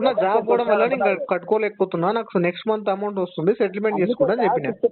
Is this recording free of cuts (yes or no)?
yes